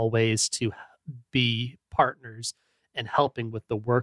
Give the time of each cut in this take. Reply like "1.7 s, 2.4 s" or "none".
none